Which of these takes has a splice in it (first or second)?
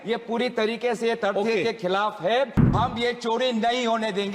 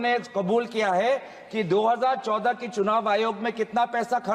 first